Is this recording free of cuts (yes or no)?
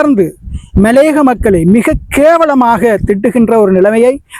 yes